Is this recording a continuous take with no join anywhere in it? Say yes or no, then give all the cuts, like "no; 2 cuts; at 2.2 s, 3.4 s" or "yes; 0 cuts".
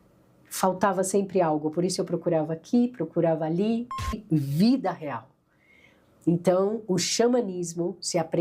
no; 1 cut; at 4.2 s